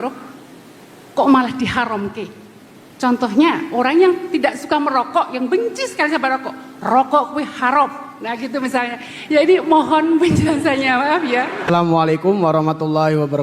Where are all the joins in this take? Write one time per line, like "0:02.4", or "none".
0:11.6